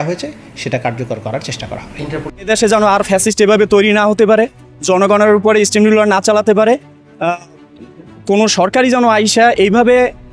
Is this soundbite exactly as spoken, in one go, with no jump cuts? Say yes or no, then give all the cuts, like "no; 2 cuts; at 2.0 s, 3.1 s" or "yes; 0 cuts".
no; 1 cut; at 2.4 s